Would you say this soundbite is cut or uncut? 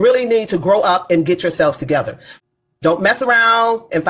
cut